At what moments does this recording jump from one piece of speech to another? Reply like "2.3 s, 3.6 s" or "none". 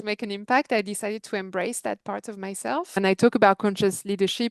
3.0 s